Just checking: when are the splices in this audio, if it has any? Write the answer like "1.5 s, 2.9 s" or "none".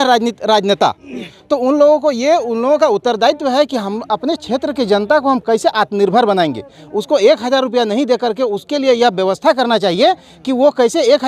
none